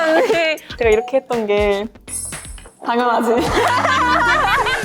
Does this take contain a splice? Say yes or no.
no